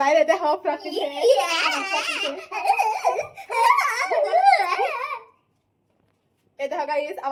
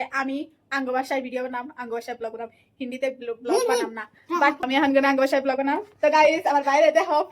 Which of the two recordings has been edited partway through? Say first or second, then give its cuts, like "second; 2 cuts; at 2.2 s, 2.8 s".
second; 1 cut; at 4.6 s